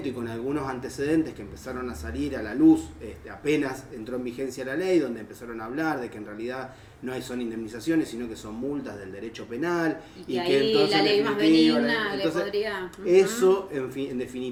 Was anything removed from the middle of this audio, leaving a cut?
no; 0 cuts

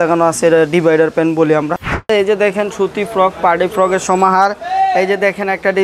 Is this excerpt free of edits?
no; 1 cut; at 2.1 s

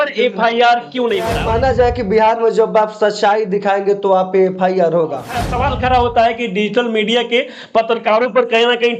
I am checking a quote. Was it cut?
yes; 2 cuts; at 1.4 s, 5.4 s

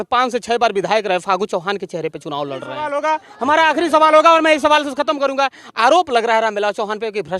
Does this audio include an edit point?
yes; 1 cut; at 2.9 s

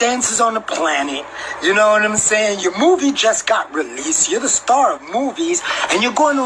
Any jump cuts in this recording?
no; 0 cuts

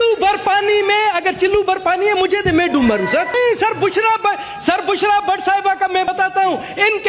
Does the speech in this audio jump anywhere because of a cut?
yes; 1 cut; at 3.3 s

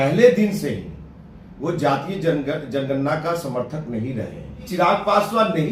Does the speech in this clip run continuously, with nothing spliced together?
no; 1 cut; at 4.6 s

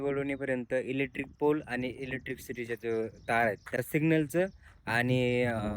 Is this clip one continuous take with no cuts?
no; 1 cut; at 3.7 s

